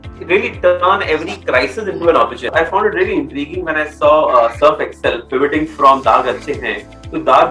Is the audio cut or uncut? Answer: cut